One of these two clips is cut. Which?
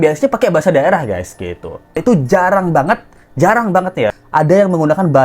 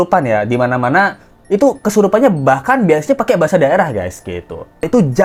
first; 1 cut; at 4.2 s

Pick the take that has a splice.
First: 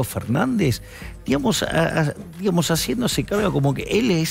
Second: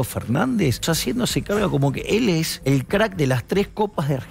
second; 2 cuts; at 0.8 s, 2.5 s

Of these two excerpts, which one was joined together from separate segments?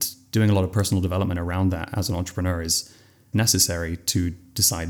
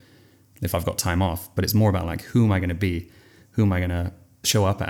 first; 1 cut; at 3.3 s

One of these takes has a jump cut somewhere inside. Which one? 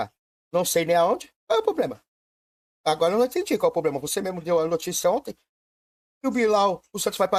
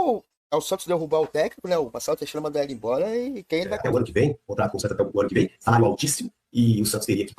second; 1 cut; at 3.8 s

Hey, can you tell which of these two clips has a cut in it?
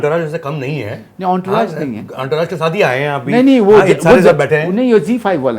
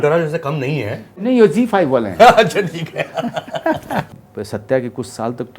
second; 2 cuts; at 1.2 s, 4.1 s

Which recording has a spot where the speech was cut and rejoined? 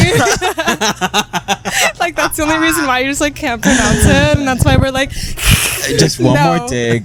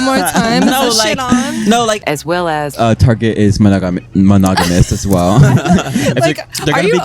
second; 1 cut; at 2.4 s

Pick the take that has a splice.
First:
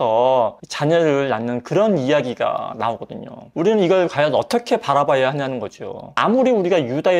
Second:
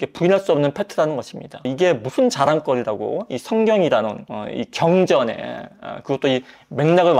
first; 2 cuts; at 3.4 s, 6.2 s

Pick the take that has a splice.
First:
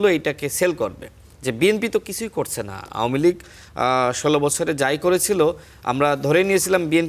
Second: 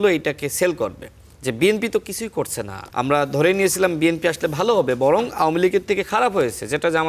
second; 1 cut; at 2.8 s

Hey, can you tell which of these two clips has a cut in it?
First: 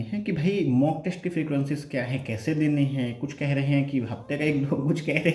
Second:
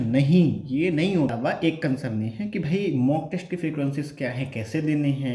second; 1 cut; at 1.3 s

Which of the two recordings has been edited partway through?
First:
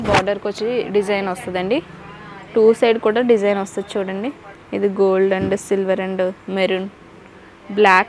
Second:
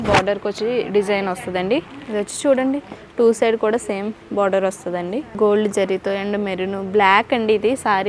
second; 2 cuts; at 2.0 s, 5.3 s

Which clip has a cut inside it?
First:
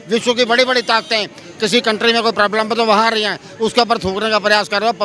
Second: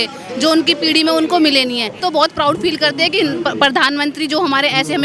second; 1 cut; at 2.0 s

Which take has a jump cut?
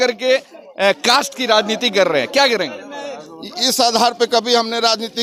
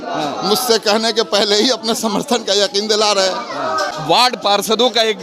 second; 1 cut; at 3.7 s

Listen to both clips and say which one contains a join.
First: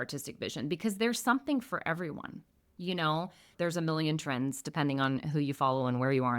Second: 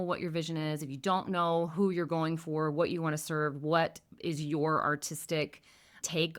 first; 1 cut; at 3.4 s

